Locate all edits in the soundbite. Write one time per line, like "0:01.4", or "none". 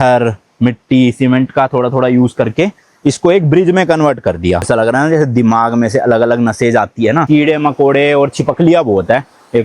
0:04.7
0:07.2